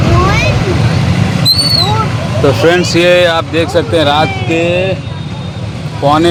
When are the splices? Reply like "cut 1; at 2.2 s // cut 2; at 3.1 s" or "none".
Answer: none